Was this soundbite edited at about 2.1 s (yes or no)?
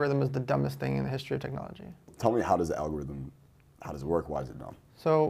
yes